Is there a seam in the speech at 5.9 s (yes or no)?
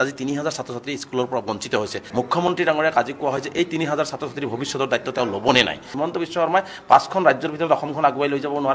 yes